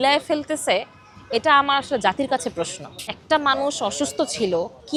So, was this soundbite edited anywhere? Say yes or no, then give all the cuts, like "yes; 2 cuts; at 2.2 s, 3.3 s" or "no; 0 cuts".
no; 0 cuts